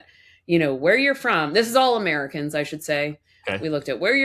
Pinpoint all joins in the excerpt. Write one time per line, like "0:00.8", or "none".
none